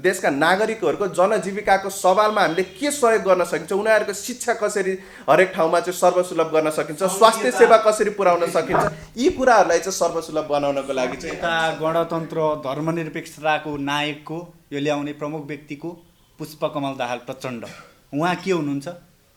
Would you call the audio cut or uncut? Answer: uncut